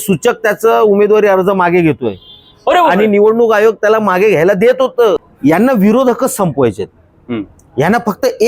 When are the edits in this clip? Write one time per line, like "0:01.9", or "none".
0:05.3